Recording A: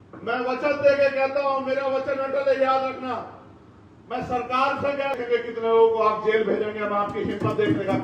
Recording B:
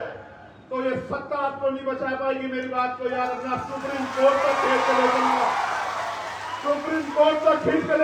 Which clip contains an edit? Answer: A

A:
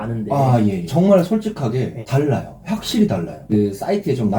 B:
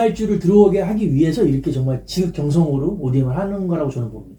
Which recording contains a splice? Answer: A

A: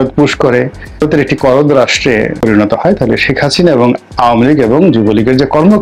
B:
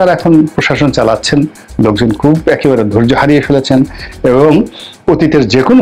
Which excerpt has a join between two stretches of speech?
A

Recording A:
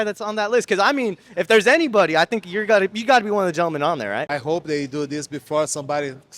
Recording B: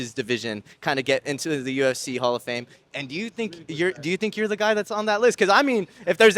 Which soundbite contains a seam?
A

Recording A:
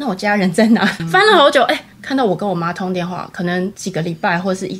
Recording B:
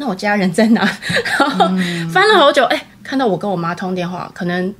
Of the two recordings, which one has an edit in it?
A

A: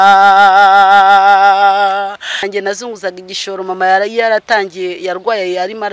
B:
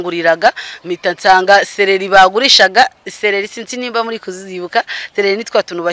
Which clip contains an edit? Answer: A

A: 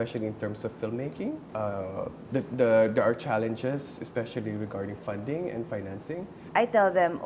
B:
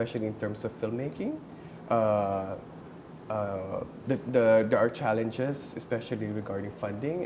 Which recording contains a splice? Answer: A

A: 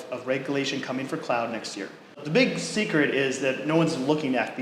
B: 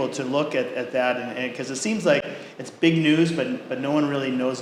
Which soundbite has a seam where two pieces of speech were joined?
A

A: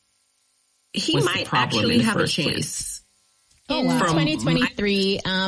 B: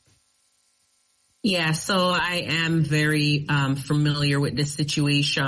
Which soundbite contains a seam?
A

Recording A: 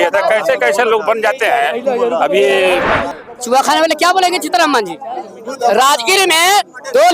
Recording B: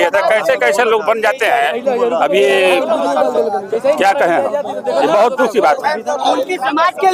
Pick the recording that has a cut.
A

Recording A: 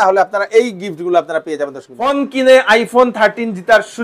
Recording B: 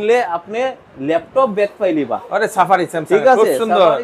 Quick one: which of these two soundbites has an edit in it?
A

